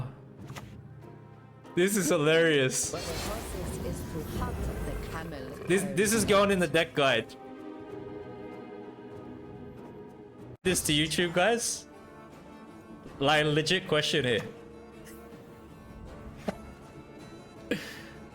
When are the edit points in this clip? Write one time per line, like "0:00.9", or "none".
0:10.6